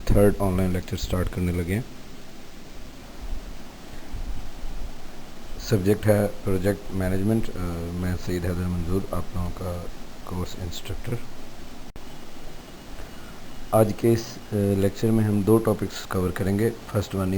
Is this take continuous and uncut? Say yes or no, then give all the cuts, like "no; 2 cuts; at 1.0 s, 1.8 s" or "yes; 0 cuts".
no; 2 cuts; at 3.0 s, 11.9 s